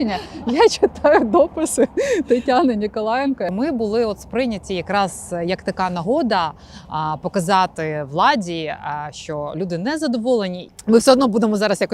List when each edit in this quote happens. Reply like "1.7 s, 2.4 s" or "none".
3.5 s, 10.6 s